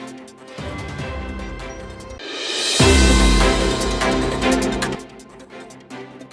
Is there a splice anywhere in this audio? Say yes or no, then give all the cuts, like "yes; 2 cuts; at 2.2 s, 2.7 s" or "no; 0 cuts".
yes; 2 cuts; at 2.2 s, 5.0 s